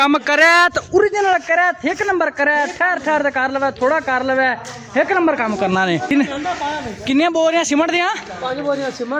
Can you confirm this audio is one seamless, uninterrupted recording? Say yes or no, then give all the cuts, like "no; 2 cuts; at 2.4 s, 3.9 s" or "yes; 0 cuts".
no; 1 cut; at 6.1 s